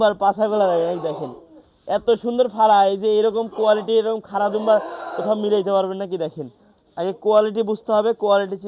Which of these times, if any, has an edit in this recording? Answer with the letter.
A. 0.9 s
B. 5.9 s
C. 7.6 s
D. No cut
D